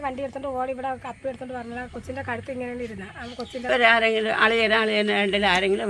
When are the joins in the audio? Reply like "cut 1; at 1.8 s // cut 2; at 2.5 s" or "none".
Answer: cut 1; at 3.7 s